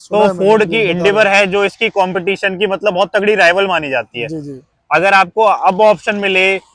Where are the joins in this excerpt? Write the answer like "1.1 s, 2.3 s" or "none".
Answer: none